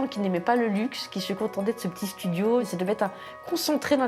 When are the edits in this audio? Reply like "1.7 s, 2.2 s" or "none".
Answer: 2.7 s